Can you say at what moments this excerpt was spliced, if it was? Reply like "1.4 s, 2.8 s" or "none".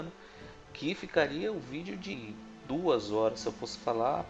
1.0 s